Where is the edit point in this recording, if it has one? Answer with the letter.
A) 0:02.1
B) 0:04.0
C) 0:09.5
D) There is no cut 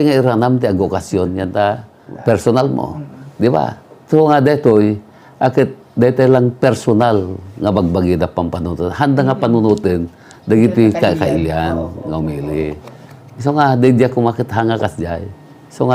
A